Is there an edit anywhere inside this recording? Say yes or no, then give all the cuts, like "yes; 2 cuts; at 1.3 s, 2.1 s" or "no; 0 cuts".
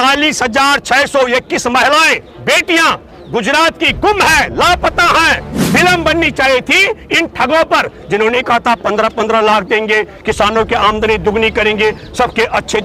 yes; 1 cut; at 5.5 s